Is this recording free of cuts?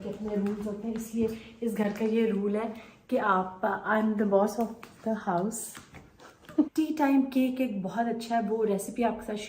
no; 1 cut; at 6.7 s

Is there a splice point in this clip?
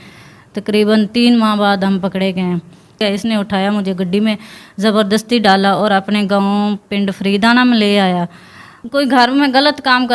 yes; 2 cuts; at 3.0 s, 8.2 s

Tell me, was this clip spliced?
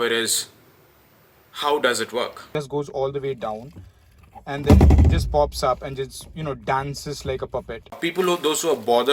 yes; 2 cuts; at 2.5 s, 8.0 s

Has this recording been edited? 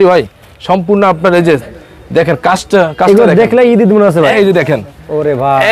yes; 1 cut; at 4.3 s

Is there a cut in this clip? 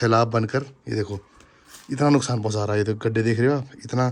no; 0 cuts

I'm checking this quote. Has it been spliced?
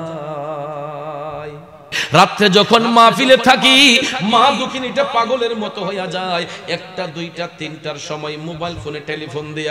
yes; 1 cut; at 2.0 s

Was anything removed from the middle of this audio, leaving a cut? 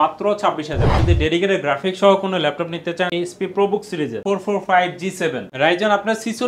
yes; 3 cuts; at 1.0 s, 3.1 s, 4.2 s

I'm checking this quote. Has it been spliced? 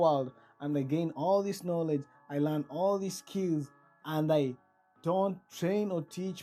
no; 0 cuts

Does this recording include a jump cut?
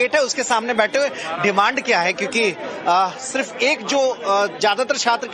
yes; 1 cut; at 2.7 s

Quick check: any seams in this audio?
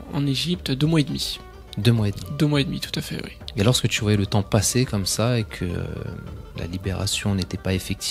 no; 0 cuts

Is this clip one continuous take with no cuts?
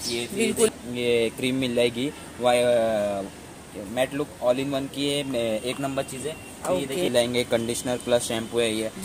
no; 2 cuts; at 0.7 s, 7.1 s

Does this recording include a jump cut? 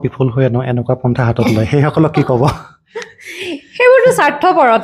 no; 0 cuts

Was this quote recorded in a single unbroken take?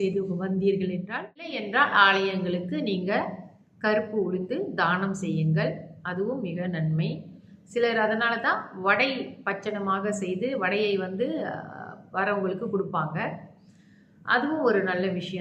no; 1 cut; at 1.6 s

